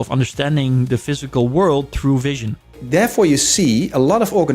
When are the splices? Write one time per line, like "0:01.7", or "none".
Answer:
0:02.7